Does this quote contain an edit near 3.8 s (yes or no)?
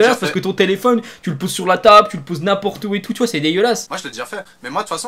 yes